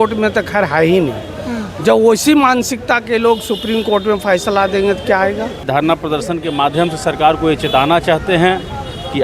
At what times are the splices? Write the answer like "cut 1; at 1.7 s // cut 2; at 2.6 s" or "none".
cut 1; at 5.6 s